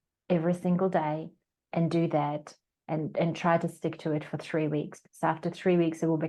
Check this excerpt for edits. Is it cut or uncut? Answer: uncut